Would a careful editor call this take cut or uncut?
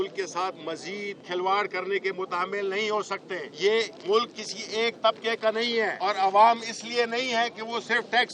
cut